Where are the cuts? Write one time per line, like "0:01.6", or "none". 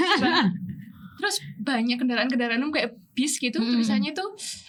none